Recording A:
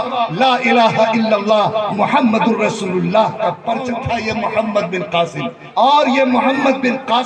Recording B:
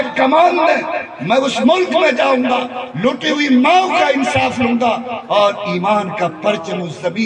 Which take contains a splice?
A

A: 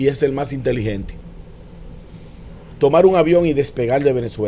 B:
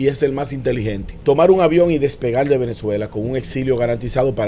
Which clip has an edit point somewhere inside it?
B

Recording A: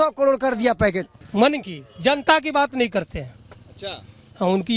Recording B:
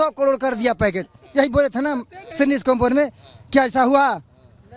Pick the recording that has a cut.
A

